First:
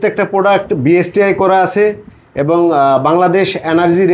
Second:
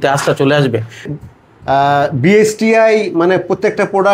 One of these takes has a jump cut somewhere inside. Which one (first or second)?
second